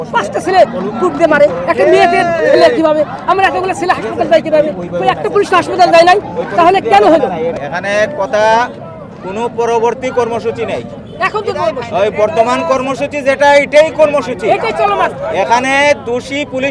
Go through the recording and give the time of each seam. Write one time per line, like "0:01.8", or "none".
0:07.6